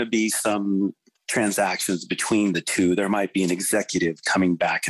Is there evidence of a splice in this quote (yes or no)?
no